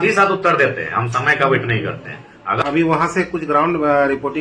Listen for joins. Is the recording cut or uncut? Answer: cut